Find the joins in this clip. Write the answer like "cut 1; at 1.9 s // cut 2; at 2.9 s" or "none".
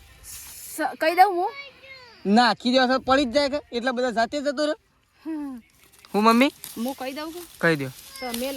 none